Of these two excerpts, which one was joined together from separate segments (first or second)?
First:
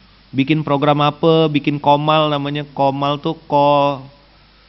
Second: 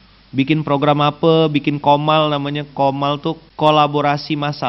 second